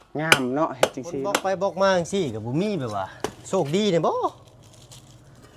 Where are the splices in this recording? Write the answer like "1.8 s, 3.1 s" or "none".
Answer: 1.2 s

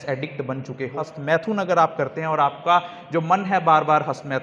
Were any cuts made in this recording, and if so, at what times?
1.0 s

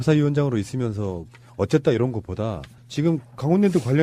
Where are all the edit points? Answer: 2.0 s

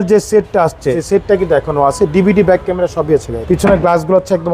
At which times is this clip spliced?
1.0 s, 3.3 s

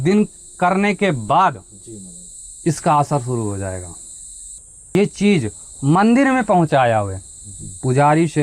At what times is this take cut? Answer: 4.9 s

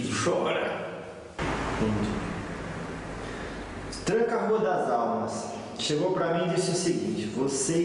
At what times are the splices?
1.4 s

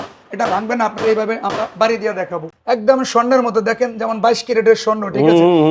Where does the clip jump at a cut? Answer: 2.4 s

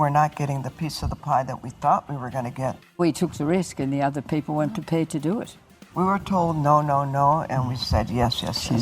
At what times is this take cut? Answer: 3.0 s, 5.8 s

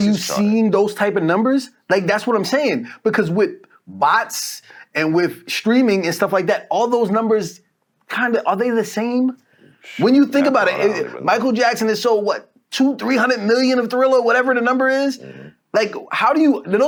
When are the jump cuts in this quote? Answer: none

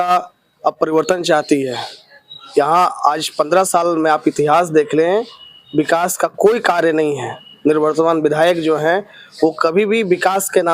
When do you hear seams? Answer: none

